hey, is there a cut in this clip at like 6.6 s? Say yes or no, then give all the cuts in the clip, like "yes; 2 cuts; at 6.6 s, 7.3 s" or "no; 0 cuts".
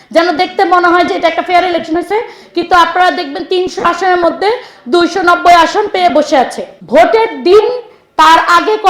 yes; 1 cut; at 6.6 s